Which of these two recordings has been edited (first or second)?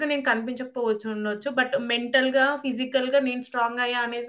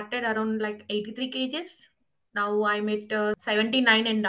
second